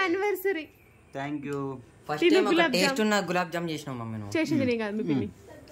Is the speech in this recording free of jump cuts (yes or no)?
yes